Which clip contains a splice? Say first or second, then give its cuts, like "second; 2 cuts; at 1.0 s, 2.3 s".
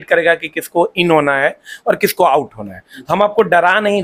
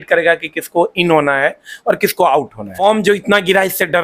second; 1 cut; at 2.7 s